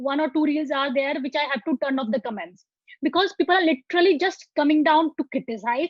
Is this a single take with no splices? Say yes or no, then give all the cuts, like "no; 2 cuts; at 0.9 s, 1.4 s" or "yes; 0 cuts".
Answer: yes; 0 cuts